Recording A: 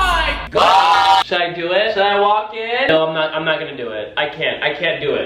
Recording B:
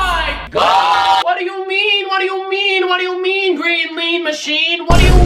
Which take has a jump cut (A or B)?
A